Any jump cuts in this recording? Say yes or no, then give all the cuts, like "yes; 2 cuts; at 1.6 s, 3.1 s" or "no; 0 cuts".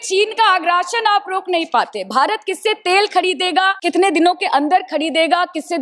yes; 1 cut; at 3.8 s